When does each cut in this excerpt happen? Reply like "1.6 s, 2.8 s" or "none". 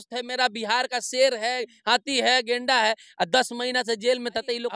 none